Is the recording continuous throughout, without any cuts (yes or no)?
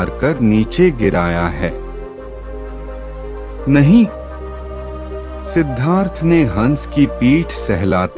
no